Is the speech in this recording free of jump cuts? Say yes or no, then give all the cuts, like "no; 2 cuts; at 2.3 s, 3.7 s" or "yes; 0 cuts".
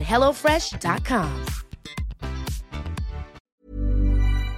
no; 1 cut; at 3.5 s